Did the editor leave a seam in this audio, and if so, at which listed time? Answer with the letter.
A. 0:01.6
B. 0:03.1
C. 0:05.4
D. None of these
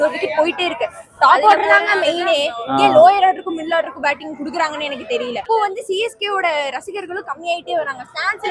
C